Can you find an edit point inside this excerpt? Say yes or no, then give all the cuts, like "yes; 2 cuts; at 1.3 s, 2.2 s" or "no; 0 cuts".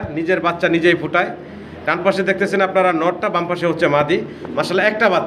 no; 0 cuts